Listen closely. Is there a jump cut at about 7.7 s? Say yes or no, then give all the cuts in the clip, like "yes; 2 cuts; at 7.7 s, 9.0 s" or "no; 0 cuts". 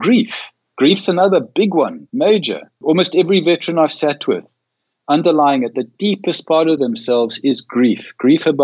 no; 2 cuts; at 2.0 s, 2.8 s